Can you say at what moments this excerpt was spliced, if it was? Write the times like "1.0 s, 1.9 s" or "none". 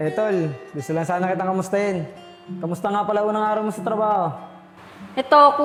none